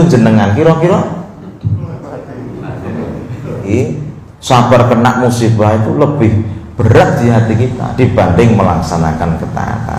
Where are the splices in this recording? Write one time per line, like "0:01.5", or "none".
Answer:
0:03.7